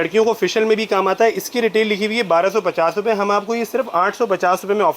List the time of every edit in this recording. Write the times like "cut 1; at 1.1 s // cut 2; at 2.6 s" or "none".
none